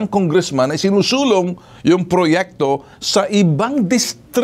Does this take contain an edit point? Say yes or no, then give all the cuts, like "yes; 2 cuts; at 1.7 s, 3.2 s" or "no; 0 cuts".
no; 0 cuts